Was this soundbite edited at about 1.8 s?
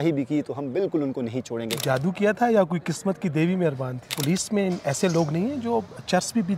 yes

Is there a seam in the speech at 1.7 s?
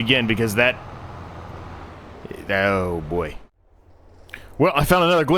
no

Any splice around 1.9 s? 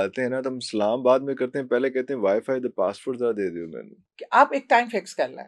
no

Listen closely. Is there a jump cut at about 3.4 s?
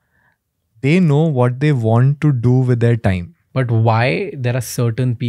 yes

